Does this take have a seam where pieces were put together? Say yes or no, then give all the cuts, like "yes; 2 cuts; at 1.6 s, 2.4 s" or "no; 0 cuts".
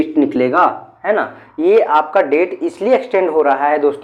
no; 0 cuts